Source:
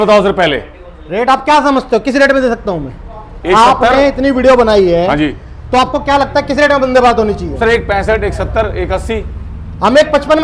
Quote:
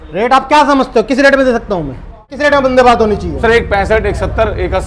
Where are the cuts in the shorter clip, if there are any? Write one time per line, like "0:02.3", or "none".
0:02.3